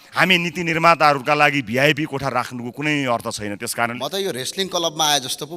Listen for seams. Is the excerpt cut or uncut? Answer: cut